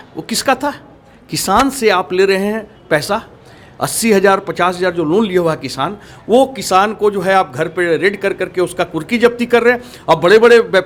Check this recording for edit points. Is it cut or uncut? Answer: uncut